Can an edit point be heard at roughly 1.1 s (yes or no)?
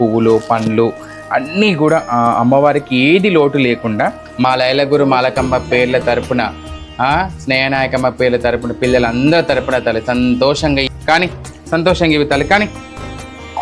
no